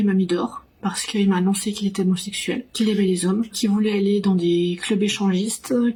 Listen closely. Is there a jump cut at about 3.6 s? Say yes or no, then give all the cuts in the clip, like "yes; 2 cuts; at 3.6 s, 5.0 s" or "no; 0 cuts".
no; 0 cuts